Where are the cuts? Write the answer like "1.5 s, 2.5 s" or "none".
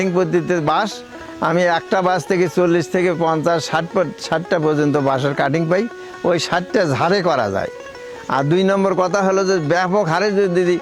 none